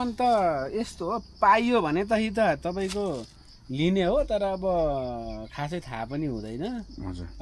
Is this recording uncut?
yes; 0 cuts

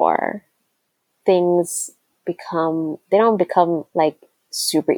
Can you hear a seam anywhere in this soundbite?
yes; 1 cut; at 3.9 s

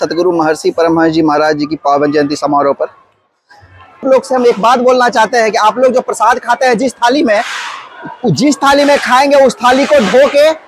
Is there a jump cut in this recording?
yes; 1 cut; at 4.0 s

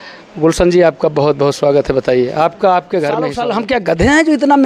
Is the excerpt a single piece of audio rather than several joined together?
no; 1 cut; at 3.3 s

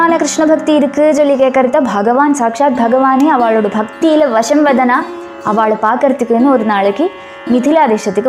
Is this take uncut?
yes; 0 cuts

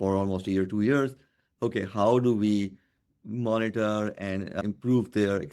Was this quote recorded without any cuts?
no; 1 cut; at 4.6 s

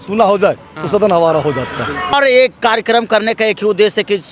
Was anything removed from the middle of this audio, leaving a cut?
yes; 1 cut; at 2.1 s

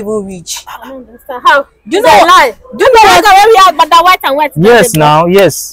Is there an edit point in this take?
no; 0 cuts

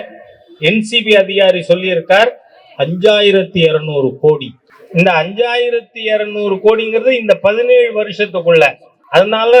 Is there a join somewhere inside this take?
no; 0 cuts

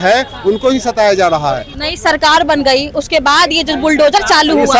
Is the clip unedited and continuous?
no; 1 cut; at 1.7 s

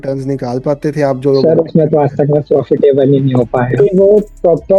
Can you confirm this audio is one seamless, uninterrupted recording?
no; 1 cut; at 3.7 s

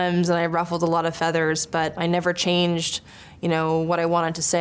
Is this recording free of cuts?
no; 1 cut; at 1.9 s

